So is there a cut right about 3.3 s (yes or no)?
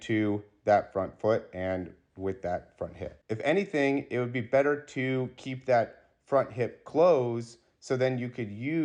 yes